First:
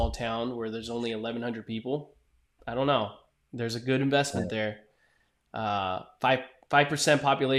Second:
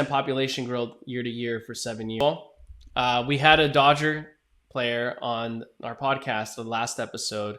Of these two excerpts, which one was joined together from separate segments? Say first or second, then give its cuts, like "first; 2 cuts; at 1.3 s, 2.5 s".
second; 1 cut; at 2.2 s